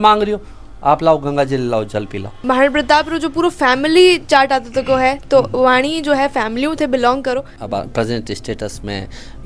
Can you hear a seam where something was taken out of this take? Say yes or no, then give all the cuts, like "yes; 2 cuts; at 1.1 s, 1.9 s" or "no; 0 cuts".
yes; 2 cuts; at 2.4 s, 7.6 s